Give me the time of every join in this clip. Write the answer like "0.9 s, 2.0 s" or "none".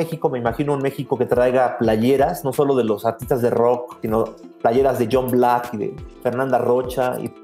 3.9 s